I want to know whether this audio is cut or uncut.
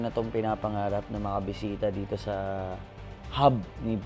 uncut